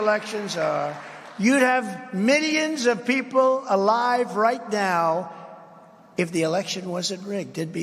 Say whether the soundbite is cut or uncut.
uncut